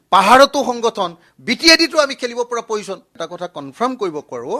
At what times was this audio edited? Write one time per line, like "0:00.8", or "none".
0:03.1